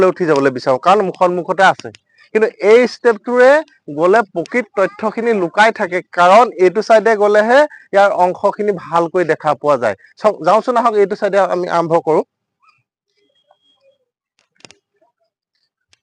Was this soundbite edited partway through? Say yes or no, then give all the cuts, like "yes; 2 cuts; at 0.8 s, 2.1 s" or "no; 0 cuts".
no; 0 cuts